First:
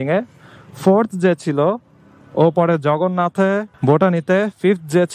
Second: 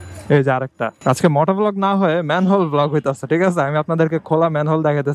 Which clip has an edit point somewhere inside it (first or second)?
second